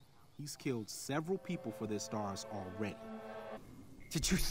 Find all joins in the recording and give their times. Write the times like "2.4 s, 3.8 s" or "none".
3.6 s